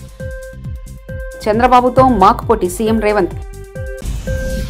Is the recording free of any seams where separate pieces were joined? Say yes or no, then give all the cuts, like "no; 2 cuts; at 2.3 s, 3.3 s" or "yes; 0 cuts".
yes; 0 cuts